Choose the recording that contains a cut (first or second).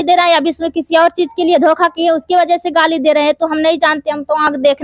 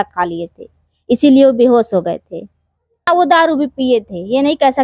second